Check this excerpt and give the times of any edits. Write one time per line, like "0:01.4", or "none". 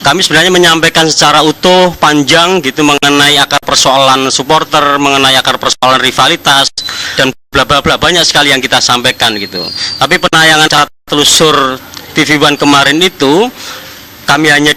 0:09.6